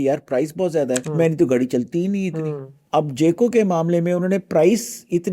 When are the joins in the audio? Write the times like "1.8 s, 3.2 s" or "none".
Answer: 1.1 s, 2.7 s